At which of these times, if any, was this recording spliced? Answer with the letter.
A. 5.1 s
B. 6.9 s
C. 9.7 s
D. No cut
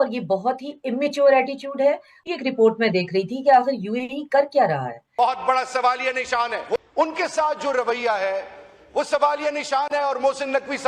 A